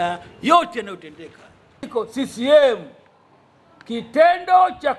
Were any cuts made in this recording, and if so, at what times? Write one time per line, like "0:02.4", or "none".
0:01.8